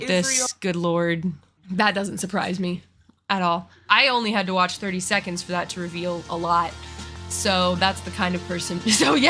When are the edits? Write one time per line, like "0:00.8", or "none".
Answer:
none